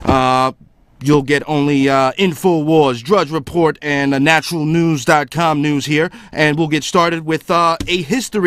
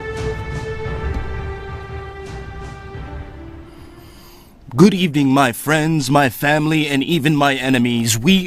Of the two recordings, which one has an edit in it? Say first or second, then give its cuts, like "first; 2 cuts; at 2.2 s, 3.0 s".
second; 1 cut; at 2.7 s